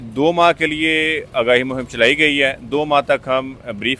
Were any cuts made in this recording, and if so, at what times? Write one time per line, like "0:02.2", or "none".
none